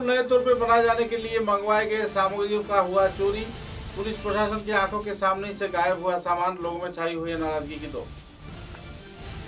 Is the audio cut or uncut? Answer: uncut